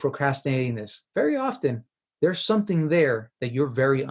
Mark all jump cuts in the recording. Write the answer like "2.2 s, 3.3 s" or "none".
0.9 s